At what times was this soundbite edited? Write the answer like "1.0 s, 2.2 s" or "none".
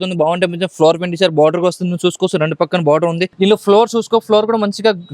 3.4 s